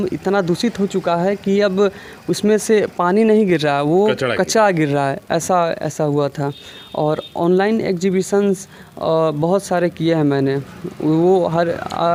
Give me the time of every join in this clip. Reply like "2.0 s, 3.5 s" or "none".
none